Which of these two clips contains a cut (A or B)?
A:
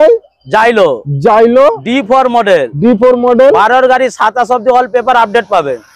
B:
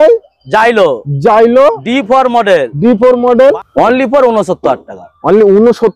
B